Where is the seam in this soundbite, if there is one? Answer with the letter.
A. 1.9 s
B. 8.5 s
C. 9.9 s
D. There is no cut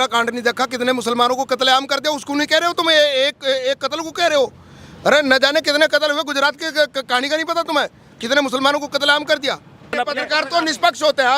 C